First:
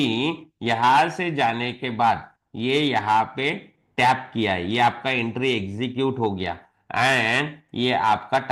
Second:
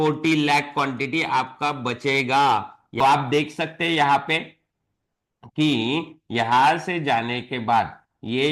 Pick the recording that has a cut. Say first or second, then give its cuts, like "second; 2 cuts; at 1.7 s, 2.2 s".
second; 1 cut; at 3.0 s